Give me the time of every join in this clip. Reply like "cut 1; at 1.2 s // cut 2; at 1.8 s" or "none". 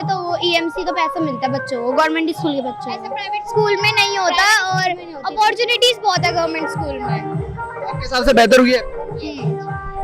none